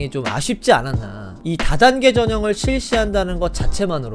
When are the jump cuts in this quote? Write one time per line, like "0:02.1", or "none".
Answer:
0:01.4